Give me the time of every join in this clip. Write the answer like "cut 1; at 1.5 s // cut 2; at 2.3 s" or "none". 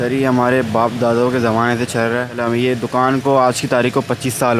cut 1; at 2.4 s

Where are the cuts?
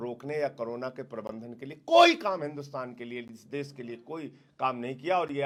none

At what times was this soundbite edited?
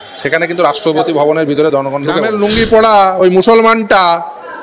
cut 1; at 2.5 s

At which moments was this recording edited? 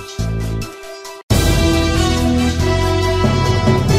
cut 1; at 1.2 s

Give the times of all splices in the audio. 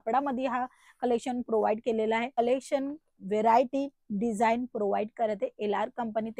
cut 1; at 2.4 s

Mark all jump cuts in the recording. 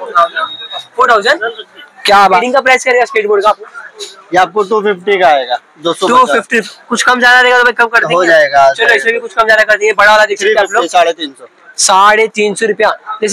cut 1; at 2.4 s

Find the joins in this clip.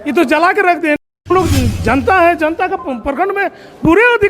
cut 1; at 1.0 s

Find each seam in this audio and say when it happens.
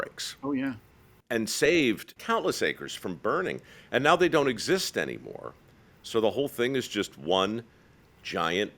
cut 1; at 2.1 s

